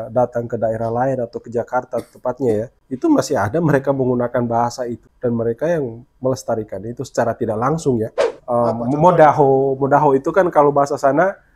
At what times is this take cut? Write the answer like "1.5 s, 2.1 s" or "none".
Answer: 2.8 s, 5.0 s, 8.3 s